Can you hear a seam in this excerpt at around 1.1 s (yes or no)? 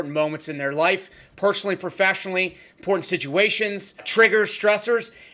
no